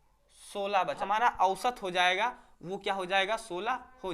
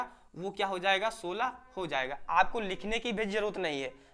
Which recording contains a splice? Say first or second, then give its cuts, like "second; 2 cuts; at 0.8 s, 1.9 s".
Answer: first; 1 cut; at 1.0 s